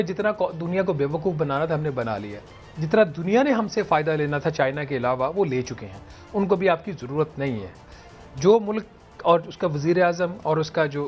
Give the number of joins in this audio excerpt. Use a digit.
0